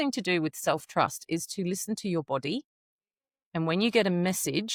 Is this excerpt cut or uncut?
uncut